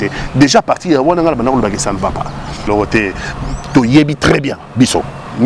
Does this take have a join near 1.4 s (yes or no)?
no